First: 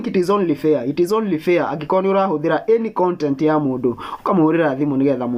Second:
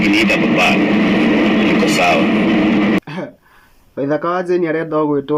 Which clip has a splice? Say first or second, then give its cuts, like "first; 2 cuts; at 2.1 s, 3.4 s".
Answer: second; 1 cut; at 3.0 s